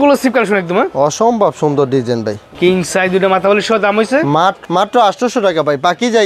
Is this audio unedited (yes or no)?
yes